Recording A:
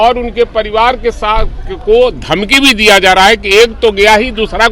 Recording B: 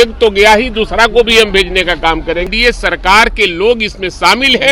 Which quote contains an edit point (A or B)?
B